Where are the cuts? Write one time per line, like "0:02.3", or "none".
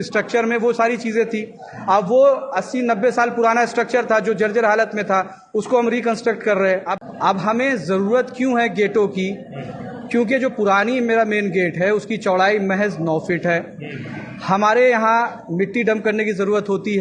0:06.9